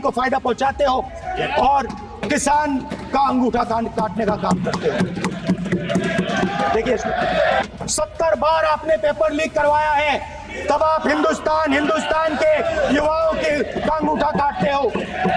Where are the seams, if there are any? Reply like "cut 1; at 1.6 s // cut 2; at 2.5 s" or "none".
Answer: cut 1; at 7.6 s